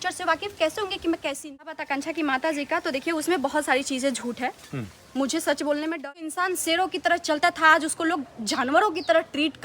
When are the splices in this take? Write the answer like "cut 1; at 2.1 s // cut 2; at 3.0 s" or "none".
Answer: cut 1; at 1.8 s // cut 2; at 5.9 s